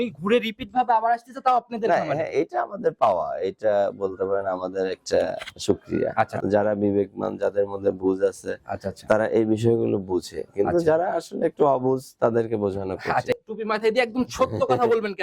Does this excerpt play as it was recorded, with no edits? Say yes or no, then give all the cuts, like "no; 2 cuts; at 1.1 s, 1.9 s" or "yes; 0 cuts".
no; 1 cut; at 13.3 s